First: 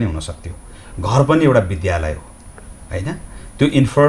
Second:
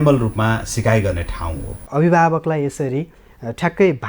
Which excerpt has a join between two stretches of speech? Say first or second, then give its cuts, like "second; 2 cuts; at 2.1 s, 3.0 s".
second; 1 cut; at 1.8 s